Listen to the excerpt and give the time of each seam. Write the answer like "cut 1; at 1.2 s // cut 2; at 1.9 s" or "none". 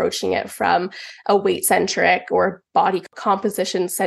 cut 1; at 3.1 s